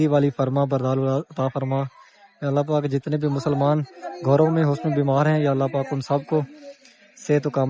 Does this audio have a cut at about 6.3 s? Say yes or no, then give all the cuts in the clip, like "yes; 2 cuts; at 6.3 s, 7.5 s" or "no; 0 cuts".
no; 0 cuts